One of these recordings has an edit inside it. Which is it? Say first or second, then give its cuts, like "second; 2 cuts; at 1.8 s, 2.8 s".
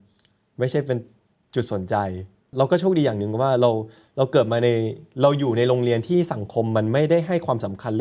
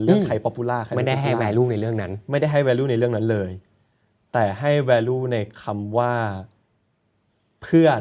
first; 1 cut; at 2.5 s